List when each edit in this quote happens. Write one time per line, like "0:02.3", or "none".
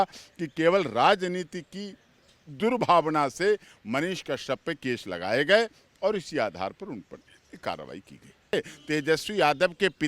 0:08.5